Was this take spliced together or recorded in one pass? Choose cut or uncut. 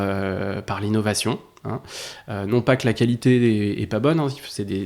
uncut